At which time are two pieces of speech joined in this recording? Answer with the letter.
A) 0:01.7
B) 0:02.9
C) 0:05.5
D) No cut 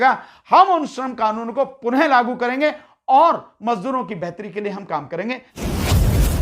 C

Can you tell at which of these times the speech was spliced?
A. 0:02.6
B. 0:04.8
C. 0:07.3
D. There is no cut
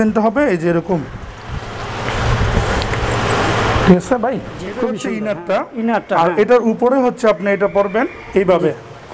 B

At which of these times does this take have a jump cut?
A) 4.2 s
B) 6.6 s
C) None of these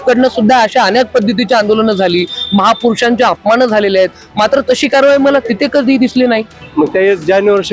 B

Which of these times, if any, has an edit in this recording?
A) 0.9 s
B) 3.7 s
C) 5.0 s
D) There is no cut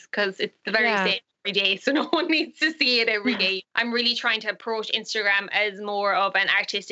B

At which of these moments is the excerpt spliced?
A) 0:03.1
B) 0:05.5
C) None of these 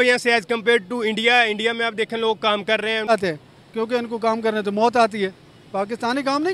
A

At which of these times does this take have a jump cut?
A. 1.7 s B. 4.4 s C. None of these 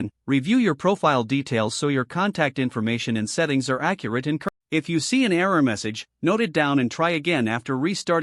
B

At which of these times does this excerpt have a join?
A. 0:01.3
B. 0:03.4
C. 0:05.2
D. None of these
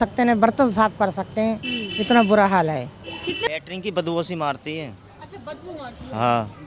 B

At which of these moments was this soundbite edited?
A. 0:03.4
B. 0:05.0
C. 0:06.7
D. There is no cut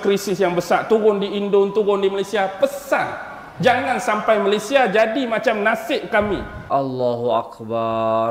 C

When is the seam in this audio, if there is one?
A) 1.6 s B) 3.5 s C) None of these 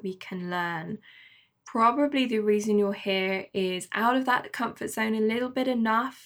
A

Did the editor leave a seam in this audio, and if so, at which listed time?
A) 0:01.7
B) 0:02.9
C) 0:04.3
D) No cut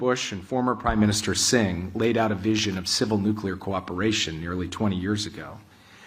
D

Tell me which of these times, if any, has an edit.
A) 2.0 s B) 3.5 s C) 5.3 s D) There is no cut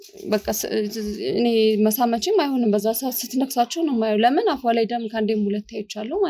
D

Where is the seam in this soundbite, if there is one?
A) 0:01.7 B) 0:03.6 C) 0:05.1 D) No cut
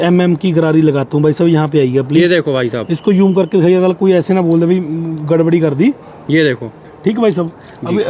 D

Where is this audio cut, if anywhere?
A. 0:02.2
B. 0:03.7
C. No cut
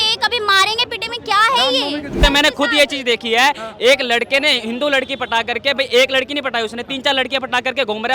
A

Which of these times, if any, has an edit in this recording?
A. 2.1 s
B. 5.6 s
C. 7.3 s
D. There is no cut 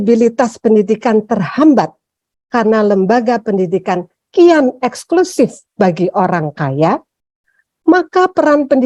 D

